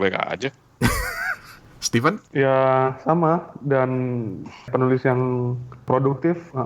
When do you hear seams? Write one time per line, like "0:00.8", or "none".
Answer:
0:04.7